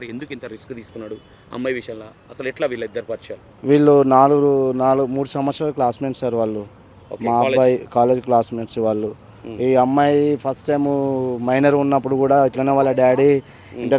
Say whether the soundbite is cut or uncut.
uncut